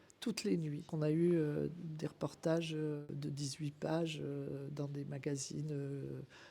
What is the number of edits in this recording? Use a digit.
2